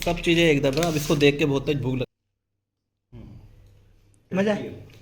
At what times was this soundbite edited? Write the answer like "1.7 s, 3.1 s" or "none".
2.1 s